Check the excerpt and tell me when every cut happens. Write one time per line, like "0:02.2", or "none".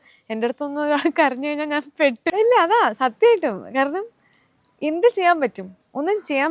0:02.2